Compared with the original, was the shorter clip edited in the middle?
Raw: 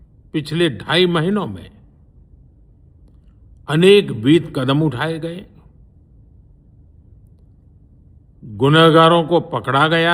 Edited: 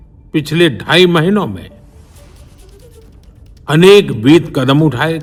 no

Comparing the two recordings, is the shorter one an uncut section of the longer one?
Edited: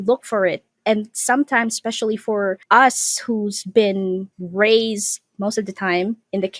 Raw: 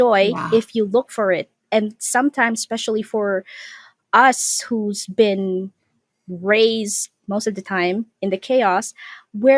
no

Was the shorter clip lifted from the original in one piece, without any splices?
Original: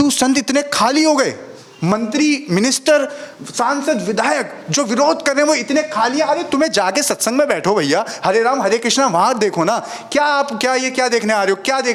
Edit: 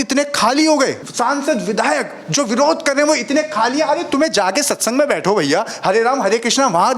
no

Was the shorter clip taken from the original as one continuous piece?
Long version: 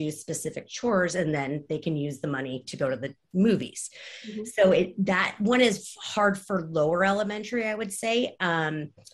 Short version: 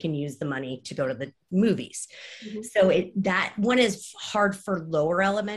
yes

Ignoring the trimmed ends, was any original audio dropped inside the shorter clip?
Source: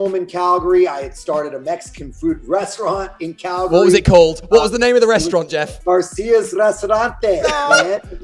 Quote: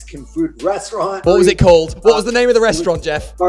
yes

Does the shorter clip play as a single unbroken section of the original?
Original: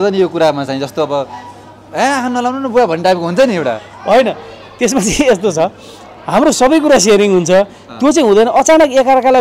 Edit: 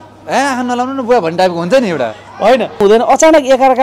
no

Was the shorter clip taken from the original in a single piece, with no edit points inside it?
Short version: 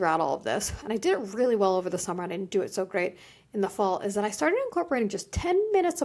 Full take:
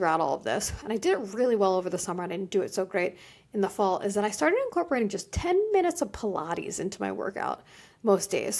yes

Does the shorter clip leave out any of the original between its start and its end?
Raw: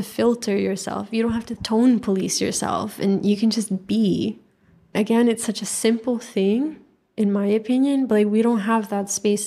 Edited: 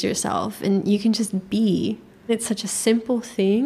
yes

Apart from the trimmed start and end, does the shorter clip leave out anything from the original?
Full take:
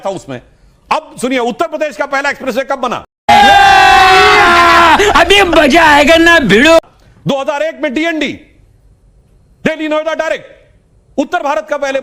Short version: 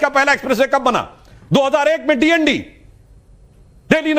yes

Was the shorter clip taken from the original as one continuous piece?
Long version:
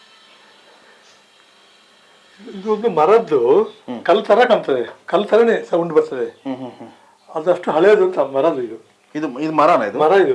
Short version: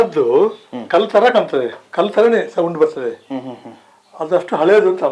yes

